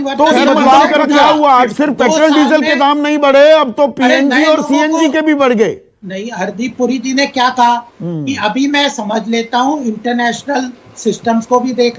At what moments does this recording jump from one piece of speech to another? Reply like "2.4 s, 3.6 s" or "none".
1.7 s